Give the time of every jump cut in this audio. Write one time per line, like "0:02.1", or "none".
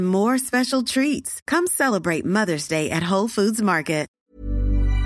0:04.1

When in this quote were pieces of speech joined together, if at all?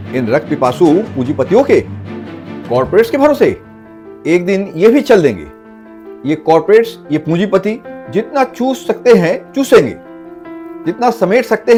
none

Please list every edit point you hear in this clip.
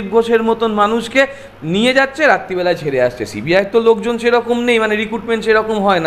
none

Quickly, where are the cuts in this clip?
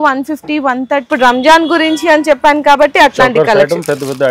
0:01.1

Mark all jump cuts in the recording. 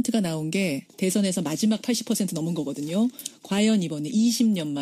0:00.9

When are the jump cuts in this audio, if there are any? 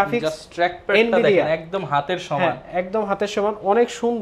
none

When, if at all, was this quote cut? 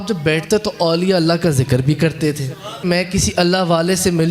0:02.8

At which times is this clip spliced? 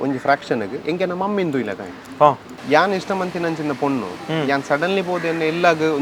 0:02.5

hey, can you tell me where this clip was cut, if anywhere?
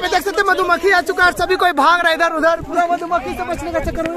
none

